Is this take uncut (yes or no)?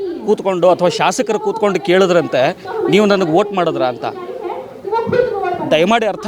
yes